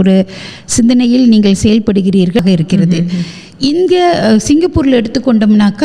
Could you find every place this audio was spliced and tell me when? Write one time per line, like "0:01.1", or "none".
0:02.4